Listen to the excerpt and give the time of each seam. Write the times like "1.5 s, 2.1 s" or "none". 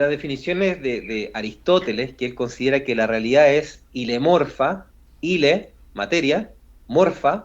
3.8 s, 5.0 s